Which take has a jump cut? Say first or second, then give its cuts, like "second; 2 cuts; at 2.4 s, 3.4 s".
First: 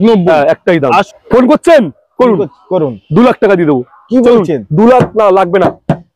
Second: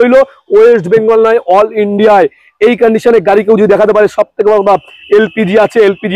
first; 1 cut; at 1.1 s